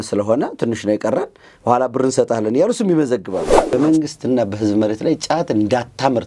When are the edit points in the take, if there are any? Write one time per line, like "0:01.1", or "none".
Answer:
0:03.7